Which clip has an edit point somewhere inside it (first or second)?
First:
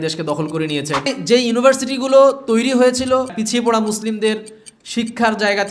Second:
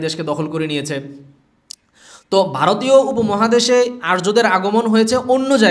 first